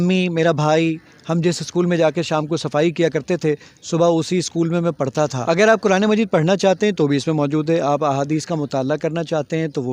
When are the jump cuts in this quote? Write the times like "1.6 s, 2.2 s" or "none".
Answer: 5.4 s